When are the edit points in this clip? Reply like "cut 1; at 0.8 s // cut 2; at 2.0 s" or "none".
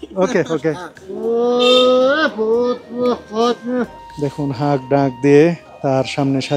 cut 1; at 1.1 s // cut 2; at 4.0 s // cut 3; at 5.7 s